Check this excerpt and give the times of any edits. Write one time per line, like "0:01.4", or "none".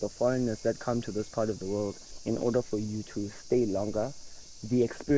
none

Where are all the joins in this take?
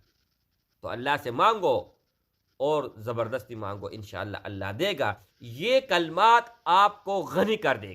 0:05.3

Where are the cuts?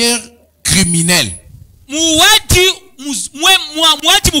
none

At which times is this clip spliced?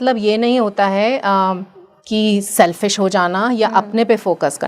none

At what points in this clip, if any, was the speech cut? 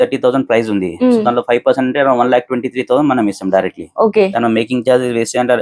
none

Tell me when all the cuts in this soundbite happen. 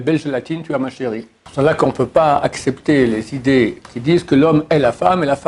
0:01.4
0:03.8

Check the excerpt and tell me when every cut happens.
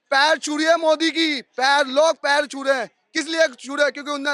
none

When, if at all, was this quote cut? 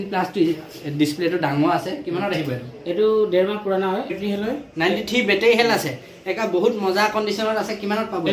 0:04.2

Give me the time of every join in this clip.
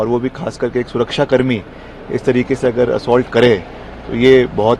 none

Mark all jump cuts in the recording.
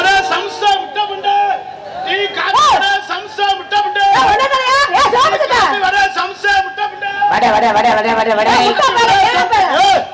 none

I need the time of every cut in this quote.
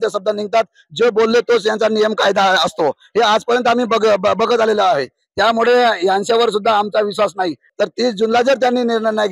0:07.6

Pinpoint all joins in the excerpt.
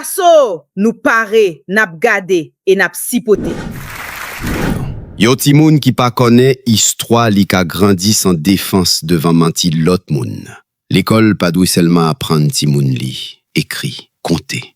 0:04.8

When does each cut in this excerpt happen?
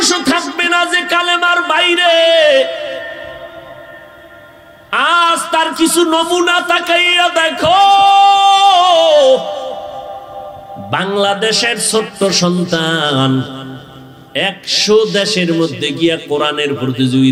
none

